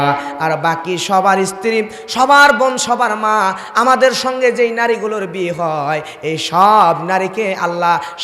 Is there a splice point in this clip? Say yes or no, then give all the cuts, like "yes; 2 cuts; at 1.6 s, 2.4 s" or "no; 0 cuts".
no; 0 cuts